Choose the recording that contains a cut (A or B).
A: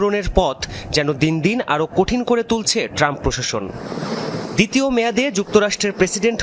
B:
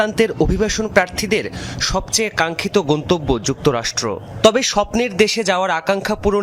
A